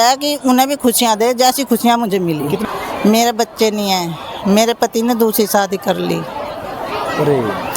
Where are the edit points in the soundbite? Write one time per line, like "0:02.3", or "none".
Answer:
0:02.6